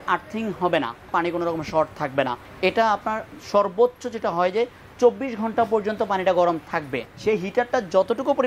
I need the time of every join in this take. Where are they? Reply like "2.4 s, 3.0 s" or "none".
1.1 s, 2.4 s, 7.0 s